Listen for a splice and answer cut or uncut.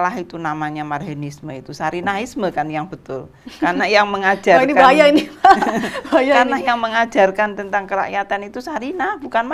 uncut